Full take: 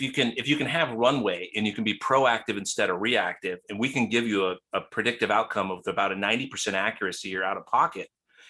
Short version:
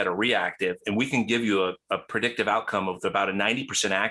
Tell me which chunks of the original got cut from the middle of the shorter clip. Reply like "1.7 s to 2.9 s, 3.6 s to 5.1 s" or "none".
none